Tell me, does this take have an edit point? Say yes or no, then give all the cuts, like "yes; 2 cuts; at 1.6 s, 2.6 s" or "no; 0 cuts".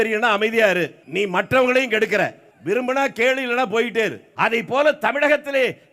yes; 3 cuts; at 1.0 s, 2.5 s, 4.2 s